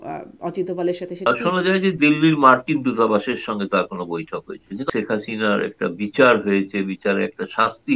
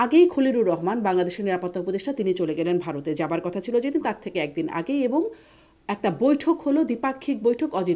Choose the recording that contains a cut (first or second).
first